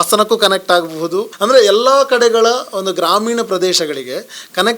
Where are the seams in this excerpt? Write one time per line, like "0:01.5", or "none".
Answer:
0:01.3